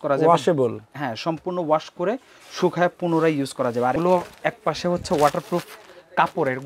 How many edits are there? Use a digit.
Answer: 1